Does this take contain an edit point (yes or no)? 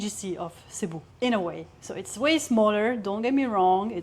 yes